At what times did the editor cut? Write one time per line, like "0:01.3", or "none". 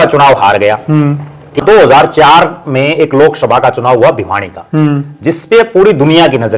0:01.6

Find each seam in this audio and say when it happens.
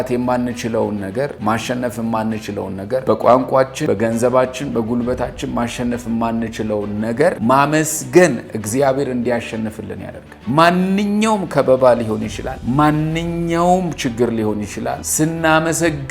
0:01.4
0:03.0
0:03.8
0:07.4

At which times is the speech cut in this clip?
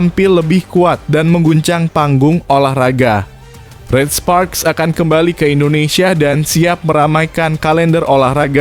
none

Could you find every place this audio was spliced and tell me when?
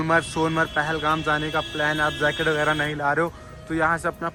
none

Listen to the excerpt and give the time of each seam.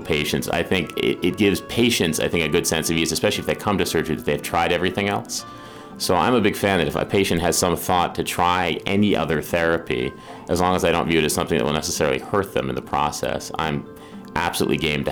none

